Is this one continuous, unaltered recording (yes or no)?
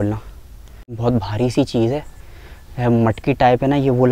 no